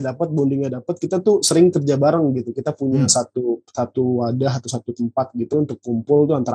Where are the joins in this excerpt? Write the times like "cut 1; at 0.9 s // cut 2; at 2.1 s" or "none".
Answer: none